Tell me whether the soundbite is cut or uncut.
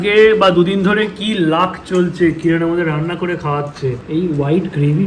cut